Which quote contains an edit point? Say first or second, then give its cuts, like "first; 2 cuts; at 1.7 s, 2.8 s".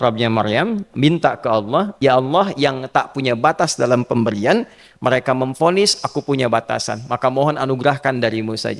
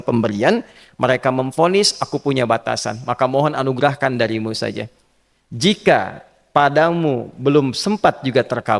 first; 1 cut; at 2.0 s